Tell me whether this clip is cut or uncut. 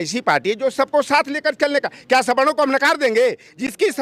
uncut